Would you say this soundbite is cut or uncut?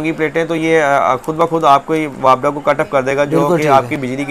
uncut